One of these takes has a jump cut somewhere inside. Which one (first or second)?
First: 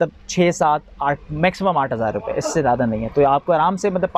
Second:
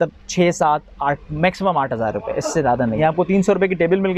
second